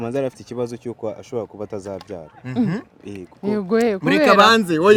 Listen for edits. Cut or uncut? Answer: uncut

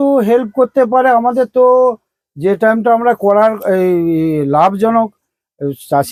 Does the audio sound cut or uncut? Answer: uncut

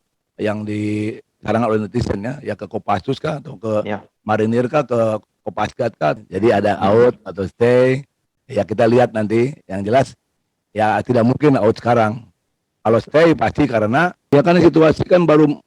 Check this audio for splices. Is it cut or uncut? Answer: cut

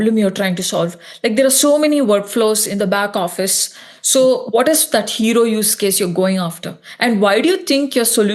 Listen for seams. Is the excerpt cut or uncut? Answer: uncut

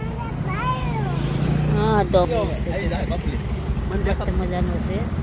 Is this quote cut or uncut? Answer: cut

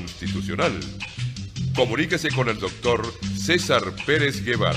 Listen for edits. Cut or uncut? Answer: uncut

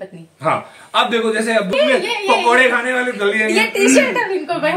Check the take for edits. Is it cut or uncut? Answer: cut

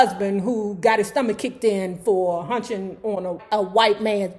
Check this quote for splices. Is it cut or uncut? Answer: cut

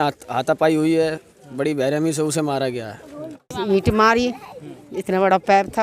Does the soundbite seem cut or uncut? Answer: cut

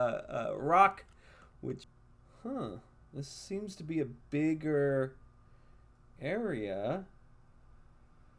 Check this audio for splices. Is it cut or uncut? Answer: cut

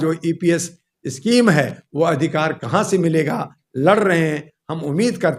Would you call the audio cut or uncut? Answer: uncut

